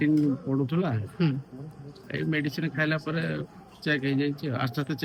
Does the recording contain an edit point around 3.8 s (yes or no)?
no